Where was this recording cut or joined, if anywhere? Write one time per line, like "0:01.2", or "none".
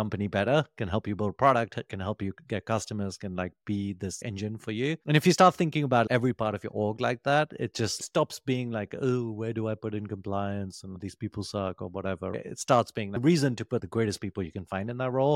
none